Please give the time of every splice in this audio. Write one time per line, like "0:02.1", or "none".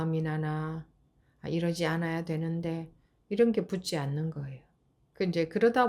0:05.0